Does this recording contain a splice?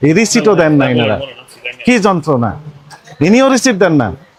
no; 0 cuts

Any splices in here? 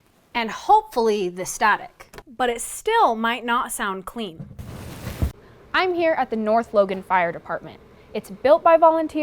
yes; 1 cut; at 5.3 s

